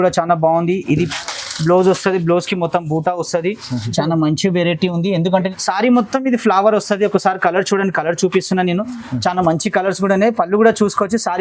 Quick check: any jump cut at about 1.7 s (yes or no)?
no